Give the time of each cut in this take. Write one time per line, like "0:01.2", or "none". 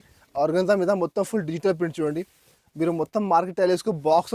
none